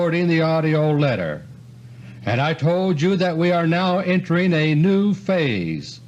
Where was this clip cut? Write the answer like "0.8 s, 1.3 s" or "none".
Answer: none